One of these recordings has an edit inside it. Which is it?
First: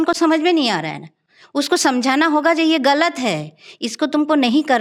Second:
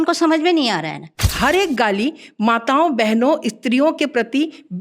second; 1 cut; at 1.3 s

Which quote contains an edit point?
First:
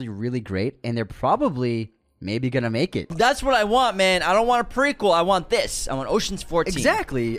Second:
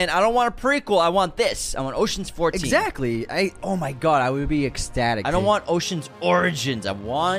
first; 1 cut; at 3.0 s

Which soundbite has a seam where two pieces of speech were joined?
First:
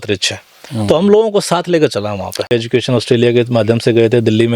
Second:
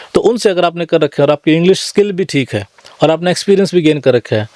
first; 1 cut; at 2.5 s

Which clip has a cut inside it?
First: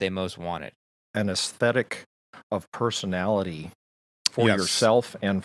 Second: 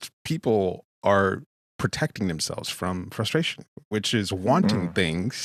first; 1 cut; at 1.1 s

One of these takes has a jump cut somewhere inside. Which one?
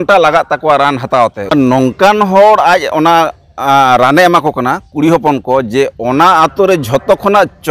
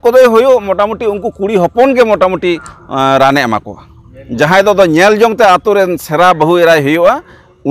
first; 1 cut; at 1.5 s

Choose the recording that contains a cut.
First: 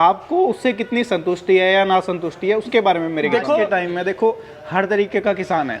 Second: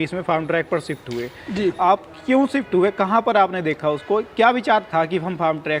first; 1 cut; at 3.7 s

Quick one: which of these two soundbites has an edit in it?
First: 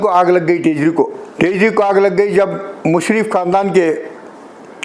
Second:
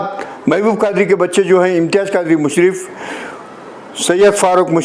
first; 1 cut; at 1.2 s

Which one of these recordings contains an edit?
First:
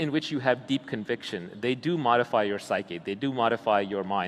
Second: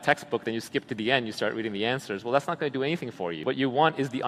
second; 1 cut; at 3.4 s

